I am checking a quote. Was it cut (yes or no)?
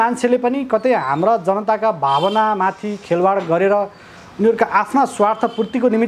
no